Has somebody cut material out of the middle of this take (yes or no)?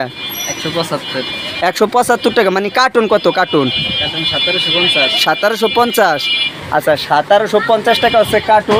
no